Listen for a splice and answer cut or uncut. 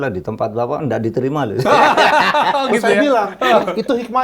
uncut